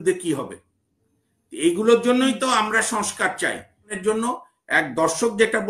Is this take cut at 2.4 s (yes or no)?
no